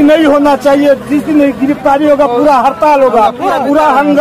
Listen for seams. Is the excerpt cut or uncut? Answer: uncut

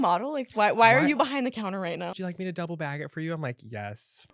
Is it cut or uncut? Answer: cut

